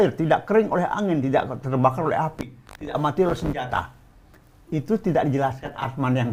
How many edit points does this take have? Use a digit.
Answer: 0